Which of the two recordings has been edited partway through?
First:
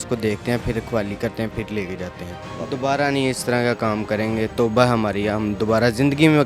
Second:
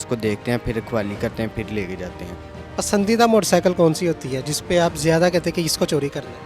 first; 1 cut; at 2.4 s

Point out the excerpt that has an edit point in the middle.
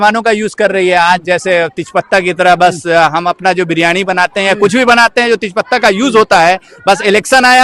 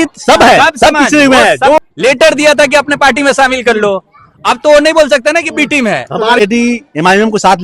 second; 2 cuts; at 1.8 s, 6.4 s

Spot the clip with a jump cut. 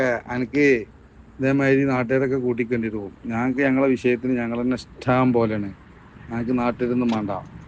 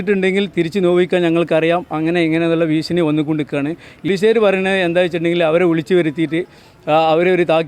second; 1 cut; at 4.1 s

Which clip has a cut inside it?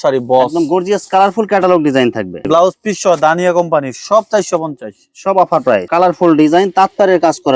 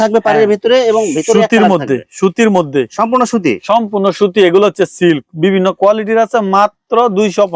first; 2 cuts; at 2.4 s, 5.9 s

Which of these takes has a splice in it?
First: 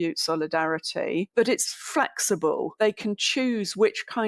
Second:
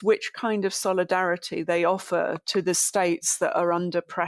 first; 2 cuts; at 1.3 s, 2.8 s

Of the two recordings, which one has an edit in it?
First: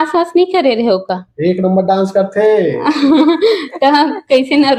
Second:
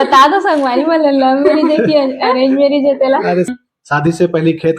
second; 1 cut; at 3.5 s

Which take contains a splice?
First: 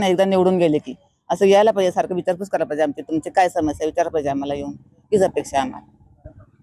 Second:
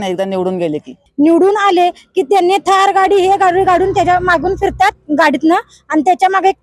second; 1 cut; at 1.0 s

